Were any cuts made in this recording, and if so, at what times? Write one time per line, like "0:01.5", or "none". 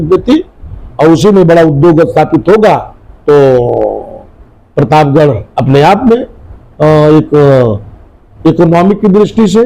none